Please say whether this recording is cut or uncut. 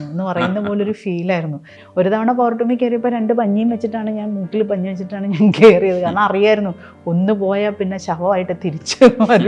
cut